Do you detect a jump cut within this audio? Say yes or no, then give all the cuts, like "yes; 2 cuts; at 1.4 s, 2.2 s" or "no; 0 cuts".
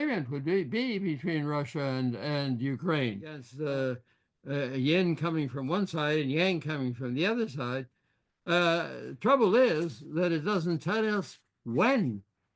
yes; 1 cut; at 3.5 s